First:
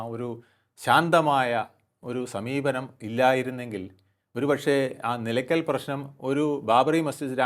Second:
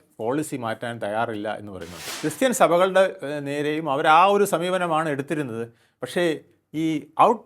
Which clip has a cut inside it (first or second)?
second